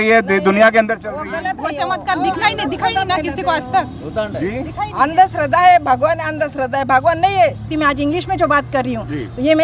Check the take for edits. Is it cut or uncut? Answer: cut